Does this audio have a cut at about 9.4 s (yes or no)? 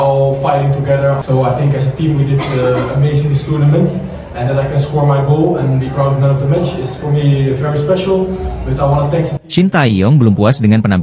yes